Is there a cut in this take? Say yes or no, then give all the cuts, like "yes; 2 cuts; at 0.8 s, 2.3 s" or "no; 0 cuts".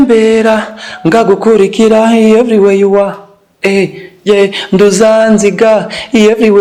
no; 0 cuts